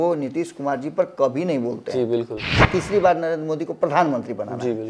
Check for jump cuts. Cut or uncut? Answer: cut